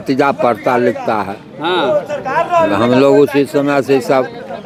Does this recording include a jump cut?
no; 0 cuts

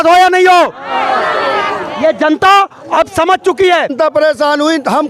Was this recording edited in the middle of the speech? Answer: yes; 1 cut; at 3.9 s

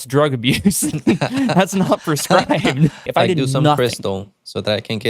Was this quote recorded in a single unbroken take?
no; 1 cut; at 3.1 s

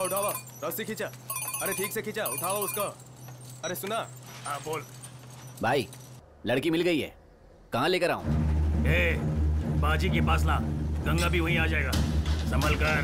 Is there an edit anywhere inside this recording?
no; 0 cuts

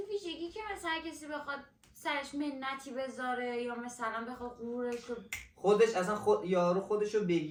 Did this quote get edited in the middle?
no; 0 cuts

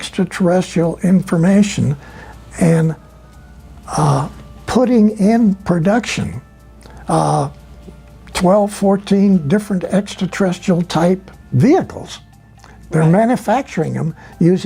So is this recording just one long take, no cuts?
yes; 0 cuts

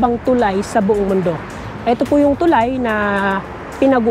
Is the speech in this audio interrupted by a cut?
no; 0 cuts

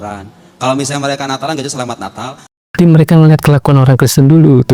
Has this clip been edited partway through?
yes; 1 cut; at 2.8 s

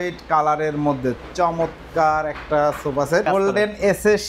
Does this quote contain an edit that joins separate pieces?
yes; 1 cut; at 3.2 s

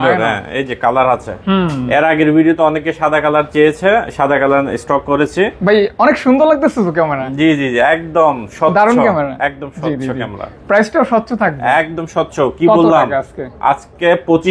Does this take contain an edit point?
no; 0 cuts

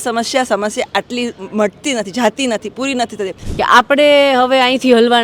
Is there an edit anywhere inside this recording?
yes; 1 cut; at 3.4 s

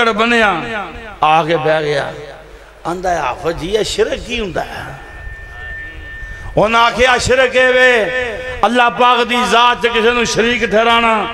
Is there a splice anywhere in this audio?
no; 0 cuts

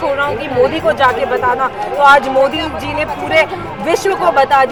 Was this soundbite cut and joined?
no; 0 cuts

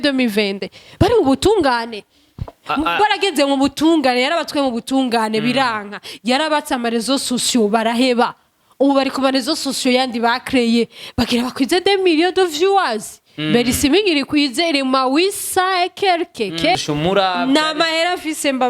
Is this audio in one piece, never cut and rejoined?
no; 1 cut; at 16.7 s

